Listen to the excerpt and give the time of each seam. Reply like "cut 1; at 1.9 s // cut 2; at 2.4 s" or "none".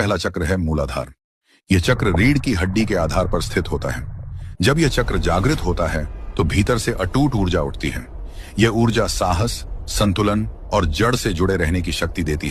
none

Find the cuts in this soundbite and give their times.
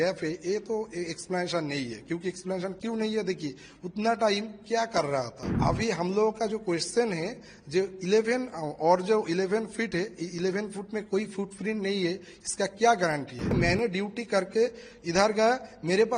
cut 1; at 5.6 s // cut 2; at 13.5 s

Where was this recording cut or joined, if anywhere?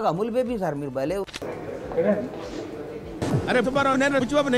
cut 1; at 1.6 s

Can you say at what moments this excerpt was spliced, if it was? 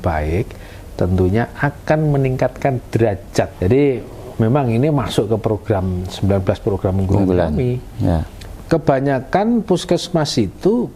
cut 1; at 3.5 s // cut 2; at 8.4 s

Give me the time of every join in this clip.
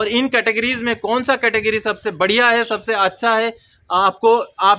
none

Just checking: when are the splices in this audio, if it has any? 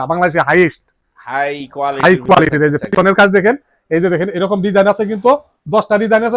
none

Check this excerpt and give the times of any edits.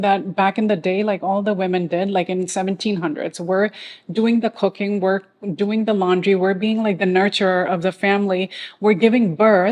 none

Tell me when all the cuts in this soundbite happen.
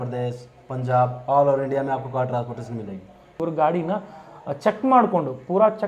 cut 1; at 3.4 s

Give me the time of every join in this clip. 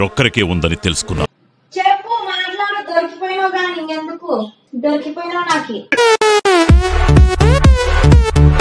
cut 1; at 4.6 s

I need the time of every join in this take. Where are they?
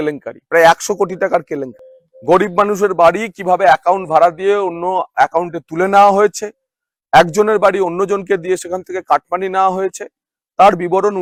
none

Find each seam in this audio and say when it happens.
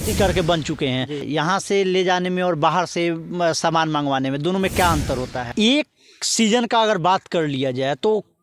cut 1; at 1.3 s // cut 2; at 5.5 s

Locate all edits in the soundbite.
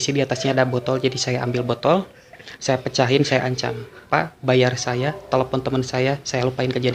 none

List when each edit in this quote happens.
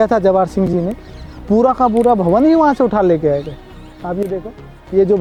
none

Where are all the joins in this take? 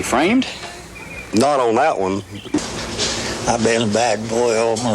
cut 1; at 2.6 s

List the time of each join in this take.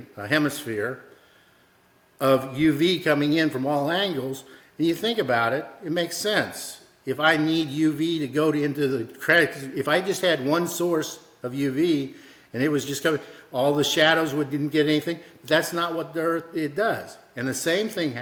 none

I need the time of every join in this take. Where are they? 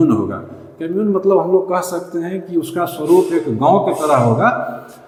none

